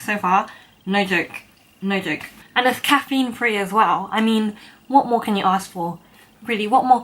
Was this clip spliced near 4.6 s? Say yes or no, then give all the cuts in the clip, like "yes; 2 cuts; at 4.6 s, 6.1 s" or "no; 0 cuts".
no; 1 cut; at 2.3 s